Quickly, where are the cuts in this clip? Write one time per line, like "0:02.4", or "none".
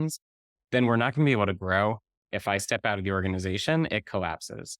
0:02.2